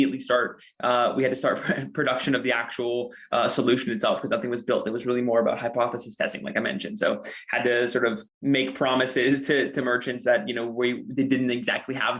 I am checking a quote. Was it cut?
no; 0 cuts

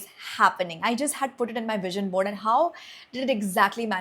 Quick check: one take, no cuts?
yes; 0 cuts

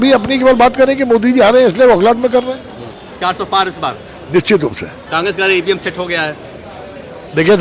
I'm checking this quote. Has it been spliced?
no; 0 cuts

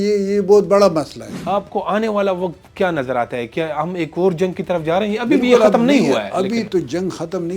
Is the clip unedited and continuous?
no; 1 cut; at 1.3 s

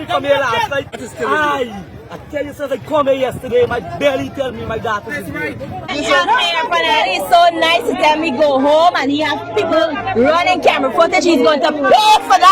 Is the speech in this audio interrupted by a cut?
yes; 2 cuts; at 1.0 s, 5.9 s

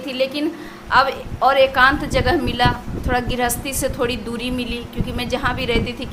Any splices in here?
no; 0 cuts

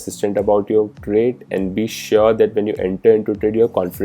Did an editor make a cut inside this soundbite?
yes; 1 cut; at 1.0 s

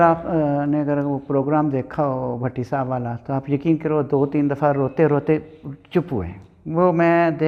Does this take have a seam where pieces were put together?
no; 0 cuts

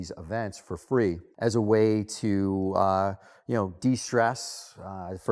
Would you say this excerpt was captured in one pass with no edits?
no; 1 cut; at 1.3 s

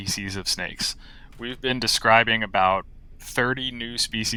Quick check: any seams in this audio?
no; 0 cuts

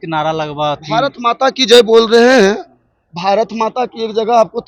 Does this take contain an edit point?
no; 0 cuts

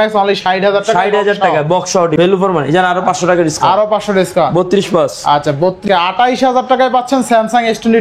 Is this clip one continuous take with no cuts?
no; 2 cuts; at 2.1 s, 5.8 s

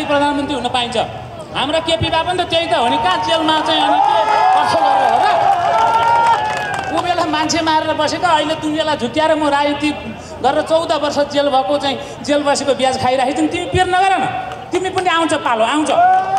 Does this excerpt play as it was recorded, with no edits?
yes; 0 cuts

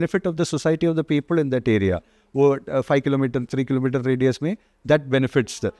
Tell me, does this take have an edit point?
no; 0 cuts

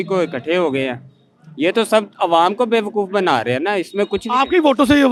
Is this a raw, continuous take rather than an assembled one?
yes; 0 cuts

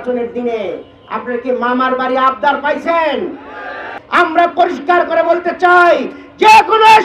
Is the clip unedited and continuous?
no; 1 cut; at 4.0 s

